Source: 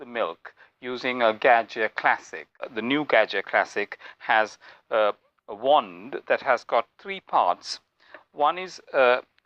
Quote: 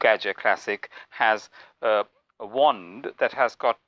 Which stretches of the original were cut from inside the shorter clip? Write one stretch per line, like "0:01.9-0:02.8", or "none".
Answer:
none